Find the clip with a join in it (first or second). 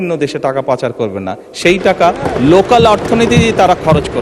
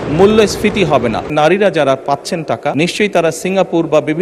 second